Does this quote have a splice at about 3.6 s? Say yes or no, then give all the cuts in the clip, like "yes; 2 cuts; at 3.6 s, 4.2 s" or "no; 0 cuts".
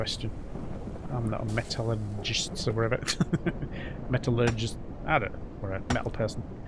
no; 0 cuts